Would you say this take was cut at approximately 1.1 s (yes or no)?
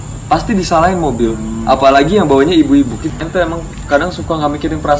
no